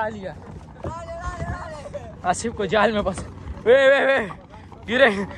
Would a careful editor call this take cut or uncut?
uncut